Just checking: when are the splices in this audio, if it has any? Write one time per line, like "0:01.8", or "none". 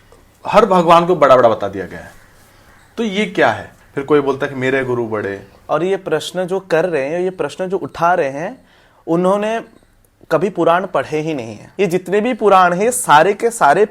0:03.7
0:05.4
0:11.6